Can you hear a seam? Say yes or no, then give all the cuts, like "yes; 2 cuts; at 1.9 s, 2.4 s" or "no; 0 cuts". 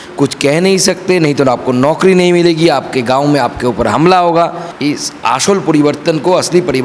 yes; 1 cut; at 4.7 s